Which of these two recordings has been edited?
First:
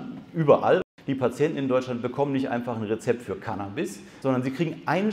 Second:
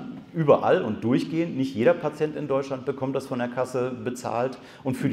first; 2 cuts; at 0.9 s, 4.0 s

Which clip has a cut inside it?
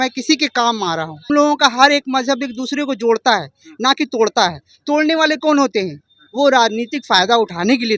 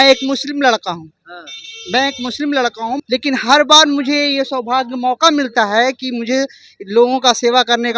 first; 1 cut; at 1.3 s

